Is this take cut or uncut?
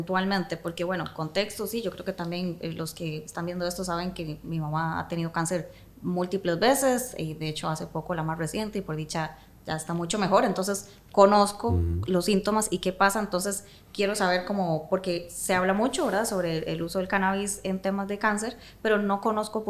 uncut